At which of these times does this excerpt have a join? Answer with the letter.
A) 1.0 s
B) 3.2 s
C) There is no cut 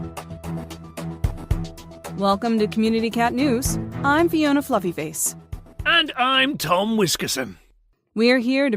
A